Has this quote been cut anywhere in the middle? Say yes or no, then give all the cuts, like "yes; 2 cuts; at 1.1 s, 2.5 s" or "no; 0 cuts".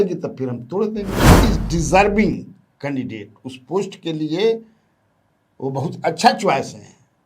yes; 1 cut; at 1.2 s